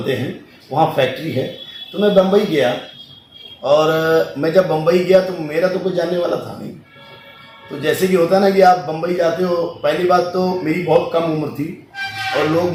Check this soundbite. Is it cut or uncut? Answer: uncut